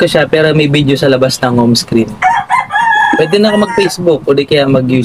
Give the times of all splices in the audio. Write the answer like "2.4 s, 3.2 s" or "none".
2.6 s